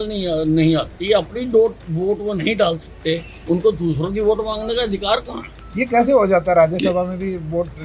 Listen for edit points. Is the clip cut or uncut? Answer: uncut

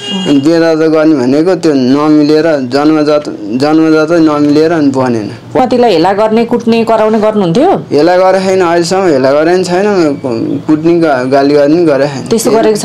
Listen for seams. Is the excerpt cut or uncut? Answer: cut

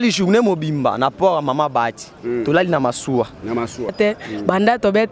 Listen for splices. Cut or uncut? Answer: cut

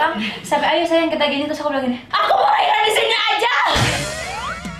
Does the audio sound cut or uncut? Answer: uncut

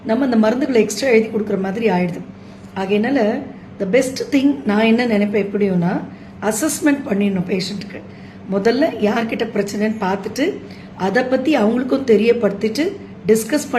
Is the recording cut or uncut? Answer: uncut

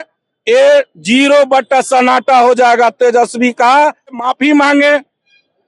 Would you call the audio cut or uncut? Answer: cut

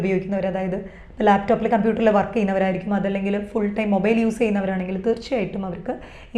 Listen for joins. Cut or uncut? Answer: uncut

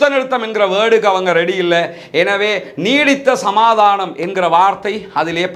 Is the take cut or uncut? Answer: uncut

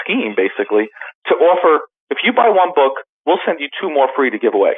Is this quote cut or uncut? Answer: uncut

